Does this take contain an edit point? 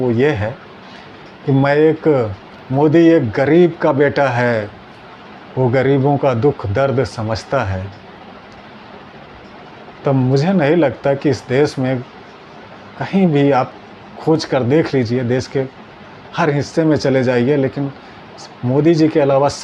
no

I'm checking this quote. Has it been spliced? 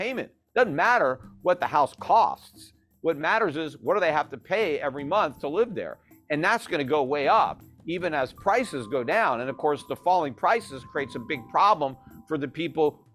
no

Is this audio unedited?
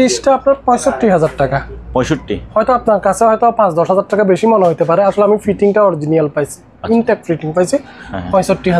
yes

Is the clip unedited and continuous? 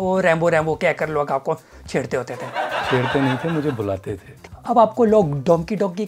no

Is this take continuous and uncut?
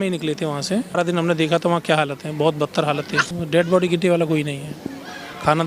no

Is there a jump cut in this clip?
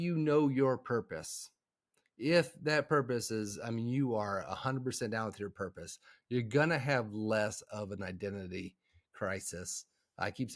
no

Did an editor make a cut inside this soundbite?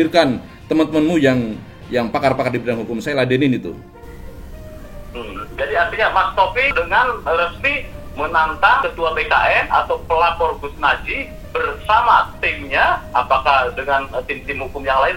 no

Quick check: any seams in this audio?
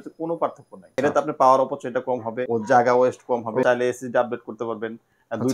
yes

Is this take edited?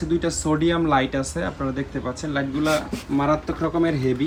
no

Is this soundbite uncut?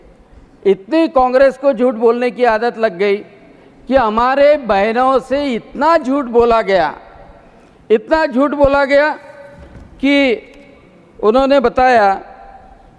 yes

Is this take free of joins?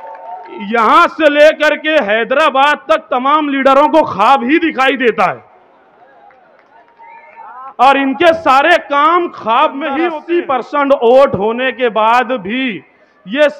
no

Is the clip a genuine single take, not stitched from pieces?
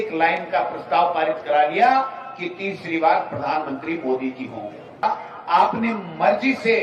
no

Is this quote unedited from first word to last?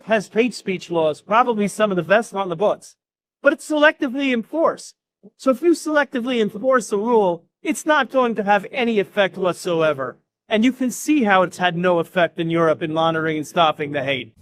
yes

